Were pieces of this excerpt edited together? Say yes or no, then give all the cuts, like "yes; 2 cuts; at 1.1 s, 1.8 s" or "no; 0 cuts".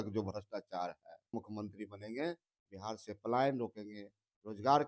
yes; 1 cut; at 1.3 s